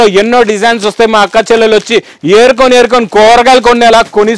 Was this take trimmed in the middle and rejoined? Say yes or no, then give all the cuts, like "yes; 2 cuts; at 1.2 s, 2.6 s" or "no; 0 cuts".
no; 0 cuts